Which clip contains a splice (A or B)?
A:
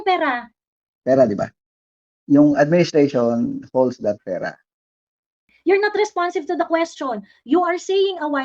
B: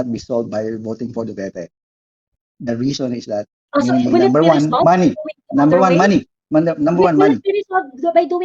A